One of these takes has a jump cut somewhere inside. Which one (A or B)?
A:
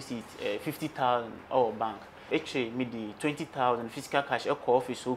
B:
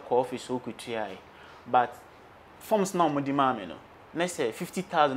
A